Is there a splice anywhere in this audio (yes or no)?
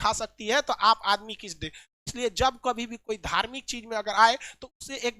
no